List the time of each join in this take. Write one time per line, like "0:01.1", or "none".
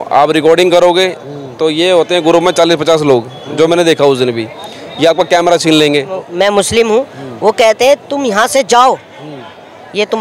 0:06.2

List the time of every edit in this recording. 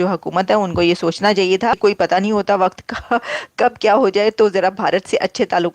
0:01.8

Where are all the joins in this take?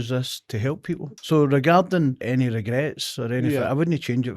0:01.1
0:02.2

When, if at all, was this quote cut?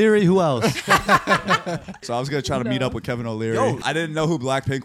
0:01.9
0:03.8

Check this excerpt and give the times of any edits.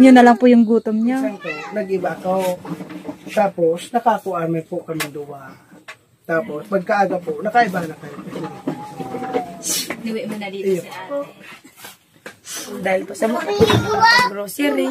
0:01.5
0:11.0

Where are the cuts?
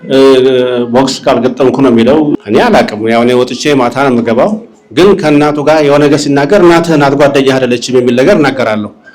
0:02.4

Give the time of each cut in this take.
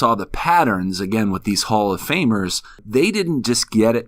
0:02.8

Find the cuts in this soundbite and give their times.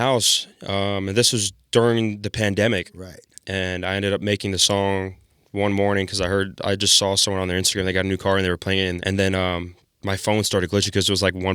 0:09.0

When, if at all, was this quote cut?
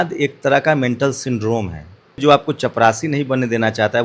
0:02.2

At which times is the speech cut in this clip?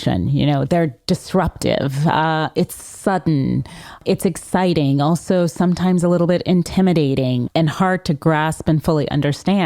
0:04.0
0:07.5

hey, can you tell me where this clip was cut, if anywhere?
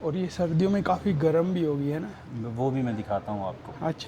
none

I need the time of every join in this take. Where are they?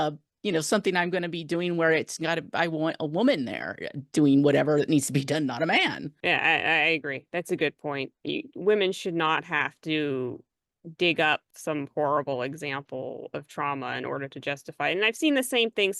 0:06.1
0:11.5

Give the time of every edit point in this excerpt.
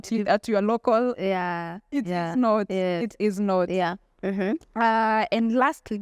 none

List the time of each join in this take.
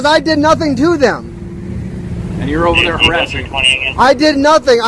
0:02.0

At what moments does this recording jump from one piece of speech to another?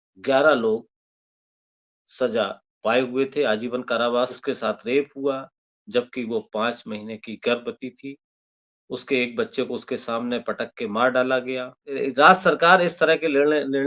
0:04.4
0:11.9

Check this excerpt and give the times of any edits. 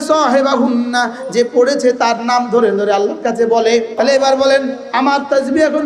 0:03.9

